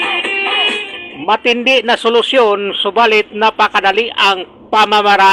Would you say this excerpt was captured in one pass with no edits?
yes; 0 cuts

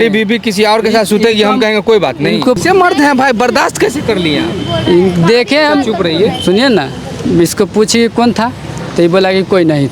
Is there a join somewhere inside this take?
yes; 1 cut; at 2.6 s

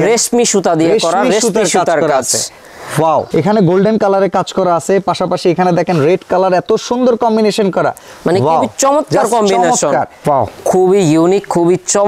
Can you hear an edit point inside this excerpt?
yes; 2 cuts; at 3.3 s, 10.1 s

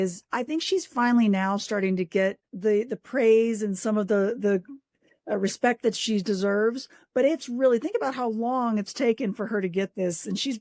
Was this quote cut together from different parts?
yes; 1 cut; at 2.1 s

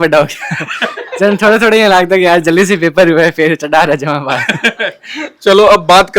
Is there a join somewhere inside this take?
no; 0 cuts

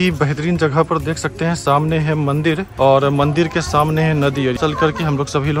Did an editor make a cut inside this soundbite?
yes; 1 cut; at 4.6 s

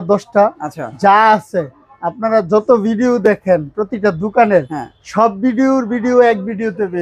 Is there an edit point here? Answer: no; 0 cuts

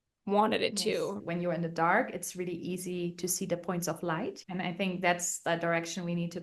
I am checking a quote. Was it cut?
yes; 2 cuts; at 1.1 s, 4.3 s

